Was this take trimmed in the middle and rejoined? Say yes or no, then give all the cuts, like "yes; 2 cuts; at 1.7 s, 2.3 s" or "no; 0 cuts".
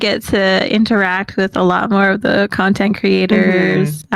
no; 0 cuts